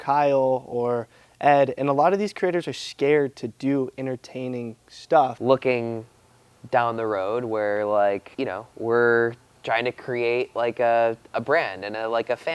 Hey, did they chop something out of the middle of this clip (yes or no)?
yes